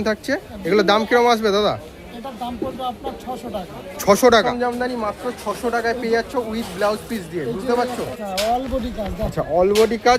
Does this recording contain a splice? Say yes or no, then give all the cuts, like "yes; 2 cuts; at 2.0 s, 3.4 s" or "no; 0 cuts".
yes; 2 cuts; at 4.5 s, 8.2 s